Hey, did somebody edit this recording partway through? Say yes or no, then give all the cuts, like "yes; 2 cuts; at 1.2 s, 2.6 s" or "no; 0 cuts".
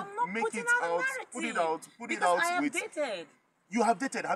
no; 0 cuts